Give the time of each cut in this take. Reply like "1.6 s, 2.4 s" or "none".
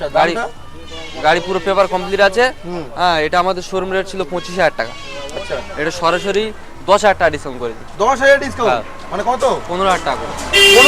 none